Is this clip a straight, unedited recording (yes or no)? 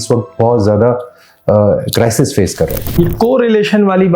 no